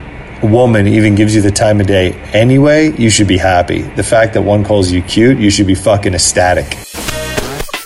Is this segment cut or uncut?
cut